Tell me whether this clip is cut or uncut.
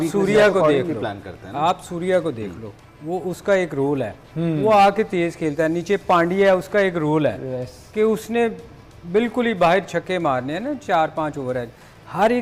uncut